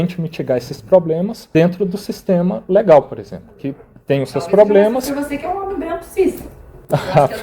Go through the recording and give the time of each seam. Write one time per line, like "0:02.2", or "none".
0:01.4